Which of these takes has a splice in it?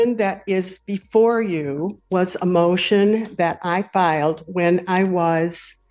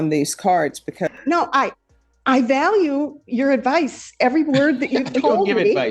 second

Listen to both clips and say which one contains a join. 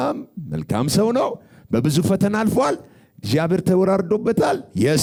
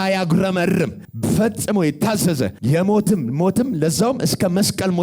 second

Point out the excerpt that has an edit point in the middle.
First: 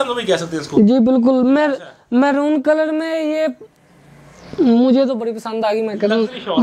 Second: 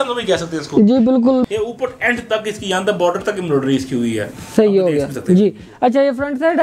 second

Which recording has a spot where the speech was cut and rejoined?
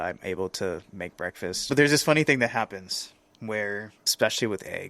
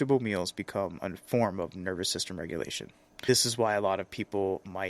first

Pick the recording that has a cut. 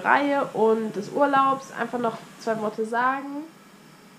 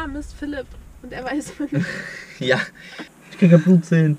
second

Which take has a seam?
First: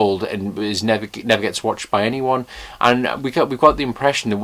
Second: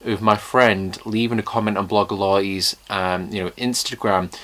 first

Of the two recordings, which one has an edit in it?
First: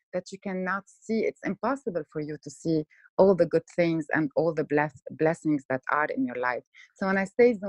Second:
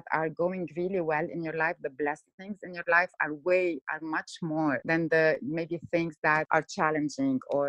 second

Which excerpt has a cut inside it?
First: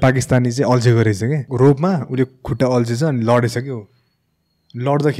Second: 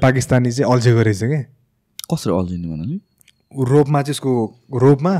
first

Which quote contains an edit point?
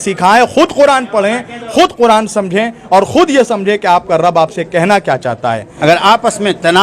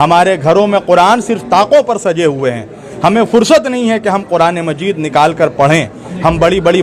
first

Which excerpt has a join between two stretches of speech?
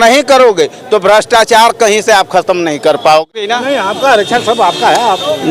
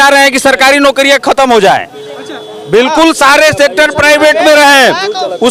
first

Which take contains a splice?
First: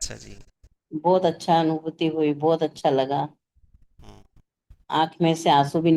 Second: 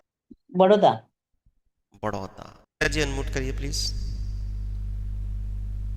second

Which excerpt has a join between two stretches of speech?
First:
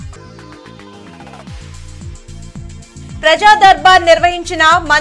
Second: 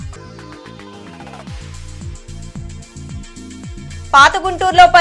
second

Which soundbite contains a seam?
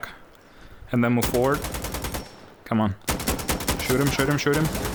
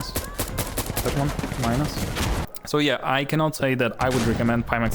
second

